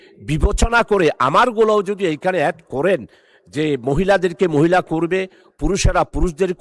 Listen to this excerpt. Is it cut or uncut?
uncut